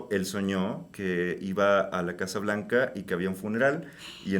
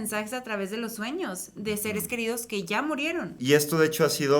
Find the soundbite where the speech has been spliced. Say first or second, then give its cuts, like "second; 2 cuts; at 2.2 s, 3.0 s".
second; 1 cut; at 3.4 s